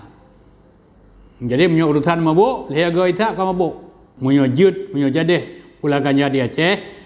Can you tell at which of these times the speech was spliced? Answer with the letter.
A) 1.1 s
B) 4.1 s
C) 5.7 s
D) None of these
B